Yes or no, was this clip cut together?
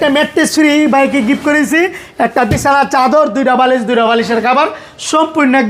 no